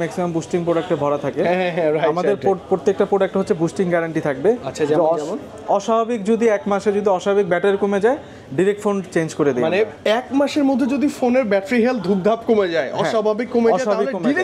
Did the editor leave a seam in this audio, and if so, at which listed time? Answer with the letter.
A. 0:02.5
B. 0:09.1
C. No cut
C